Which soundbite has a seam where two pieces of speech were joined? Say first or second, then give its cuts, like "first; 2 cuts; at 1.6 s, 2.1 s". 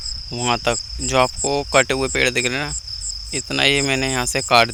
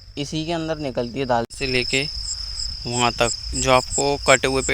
second; 1 cut; at 1.5 s